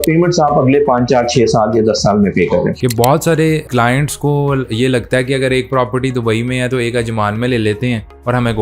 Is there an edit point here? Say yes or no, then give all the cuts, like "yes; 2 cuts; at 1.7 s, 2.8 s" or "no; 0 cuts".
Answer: yes; 1 cut; at 2.8 s